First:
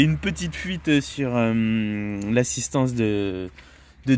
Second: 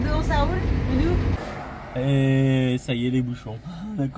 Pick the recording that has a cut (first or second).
second